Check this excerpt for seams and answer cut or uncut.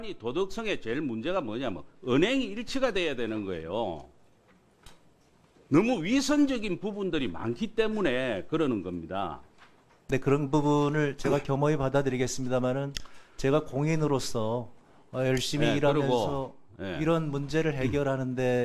uncut